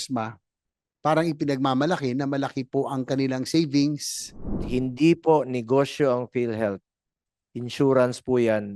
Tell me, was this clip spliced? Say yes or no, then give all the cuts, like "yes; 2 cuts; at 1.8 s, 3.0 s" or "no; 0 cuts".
yes; 1 cut; at 4.6 s